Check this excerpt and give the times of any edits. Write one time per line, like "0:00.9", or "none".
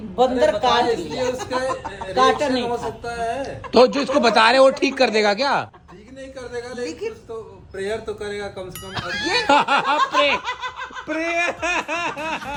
none